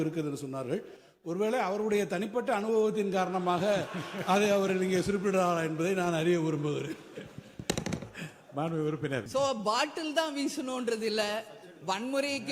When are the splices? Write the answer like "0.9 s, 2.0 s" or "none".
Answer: 9.3 s